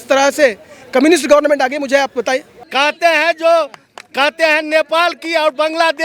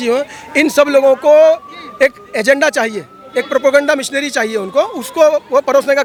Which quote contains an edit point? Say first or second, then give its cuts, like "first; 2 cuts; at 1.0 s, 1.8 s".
first; 1 cut; at 2.6 s